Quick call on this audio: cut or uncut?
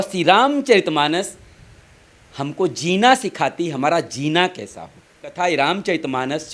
cut